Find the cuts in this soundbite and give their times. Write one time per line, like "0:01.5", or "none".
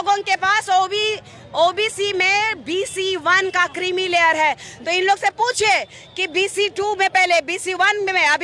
0:04.7